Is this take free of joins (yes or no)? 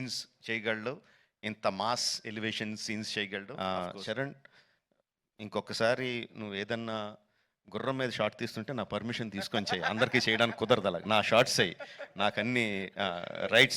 no